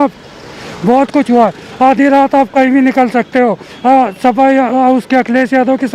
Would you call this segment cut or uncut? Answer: uncut